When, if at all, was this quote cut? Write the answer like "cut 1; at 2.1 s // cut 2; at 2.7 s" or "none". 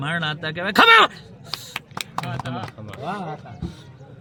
none